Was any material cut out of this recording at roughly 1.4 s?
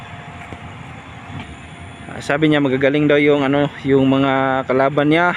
yes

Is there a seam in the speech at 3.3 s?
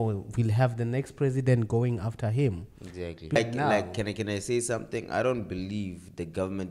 yes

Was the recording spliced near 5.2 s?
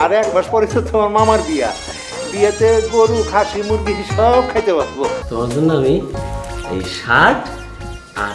yes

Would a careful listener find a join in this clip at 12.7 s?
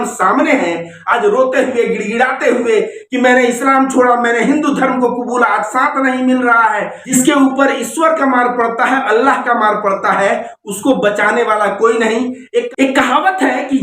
yes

